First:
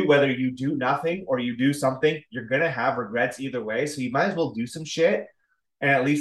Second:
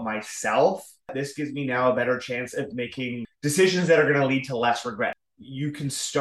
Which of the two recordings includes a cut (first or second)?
second